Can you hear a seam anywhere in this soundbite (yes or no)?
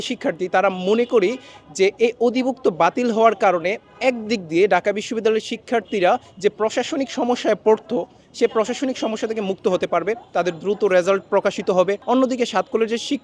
no